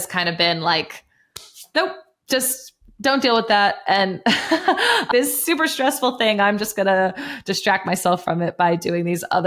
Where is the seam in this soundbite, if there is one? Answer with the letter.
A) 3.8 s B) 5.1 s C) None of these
B